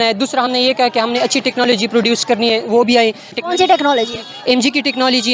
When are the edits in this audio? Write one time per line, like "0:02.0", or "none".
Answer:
0:03.3